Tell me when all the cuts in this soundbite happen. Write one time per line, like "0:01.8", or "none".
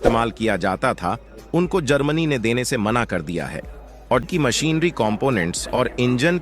0:04.3